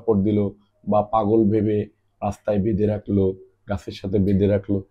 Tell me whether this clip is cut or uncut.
uncut